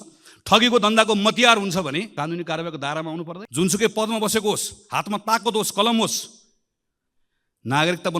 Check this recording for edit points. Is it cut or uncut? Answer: cut